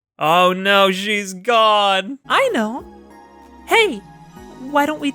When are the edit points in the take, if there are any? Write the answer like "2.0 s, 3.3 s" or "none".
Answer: 2.2 s